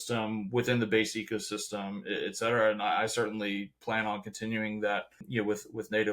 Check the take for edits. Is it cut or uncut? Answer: cut